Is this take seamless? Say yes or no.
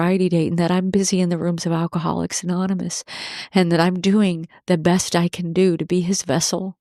yes